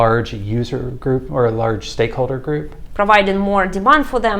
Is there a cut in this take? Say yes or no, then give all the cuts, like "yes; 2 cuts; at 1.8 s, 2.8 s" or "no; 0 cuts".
yes; 1 cut; at 2.8 s